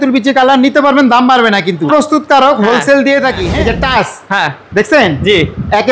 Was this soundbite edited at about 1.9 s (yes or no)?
yes